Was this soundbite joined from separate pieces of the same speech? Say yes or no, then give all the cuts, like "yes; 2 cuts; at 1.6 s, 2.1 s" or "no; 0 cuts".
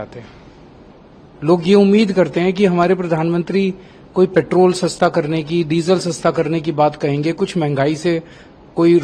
no; 0 cuts